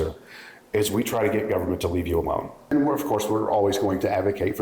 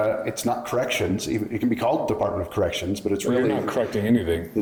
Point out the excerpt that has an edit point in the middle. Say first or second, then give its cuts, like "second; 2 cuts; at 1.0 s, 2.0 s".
first; 1 cut; at 2.7 s